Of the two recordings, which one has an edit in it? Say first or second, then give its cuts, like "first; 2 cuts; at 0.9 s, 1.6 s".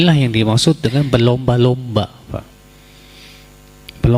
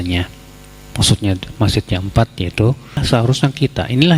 second; 1 cut; at 3.0 s